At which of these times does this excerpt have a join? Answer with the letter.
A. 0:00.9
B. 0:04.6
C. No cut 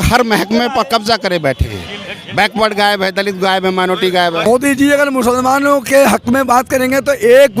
B